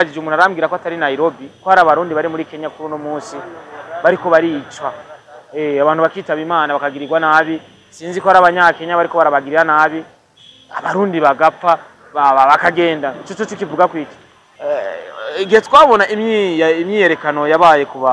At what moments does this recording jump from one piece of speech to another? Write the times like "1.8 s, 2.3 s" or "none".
14.5 s